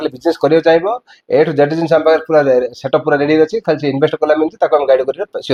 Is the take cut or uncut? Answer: uncut